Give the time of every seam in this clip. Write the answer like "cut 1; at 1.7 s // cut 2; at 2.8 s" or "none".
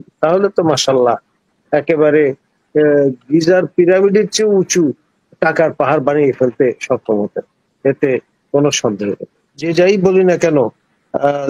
cut 1; at 9.6 s